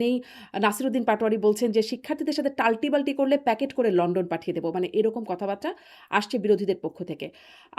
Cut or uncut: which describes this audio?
uncut